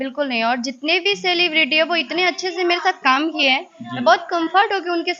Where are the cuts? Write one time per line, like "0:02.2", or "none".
none